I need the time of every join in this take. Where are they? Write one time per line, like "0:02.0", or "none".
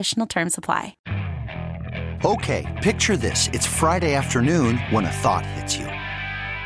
0:01.0